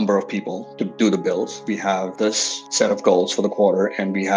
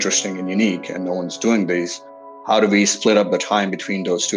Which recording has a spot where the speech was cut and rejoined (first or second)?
second